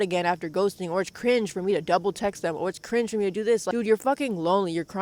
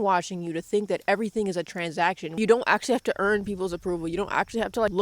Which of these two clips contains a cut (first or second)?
second